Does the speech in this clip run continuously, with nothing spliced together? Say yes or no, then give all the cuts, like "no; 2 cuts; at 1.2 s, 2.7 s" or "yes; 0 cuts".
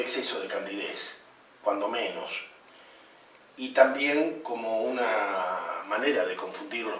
yes; 0 cuts